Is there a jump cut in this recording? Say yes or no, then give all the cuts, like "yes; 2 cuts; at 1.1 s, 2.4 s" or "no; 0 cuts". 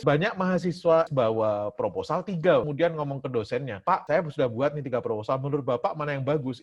yes; 2 cuts; at 1.1 s, 4.0 s